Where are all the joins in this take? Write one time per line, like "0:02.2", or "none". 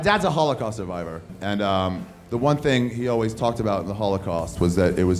0:01.3